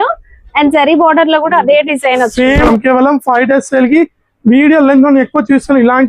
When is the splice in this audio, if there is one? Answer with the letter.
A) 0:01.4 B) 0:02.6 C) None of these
B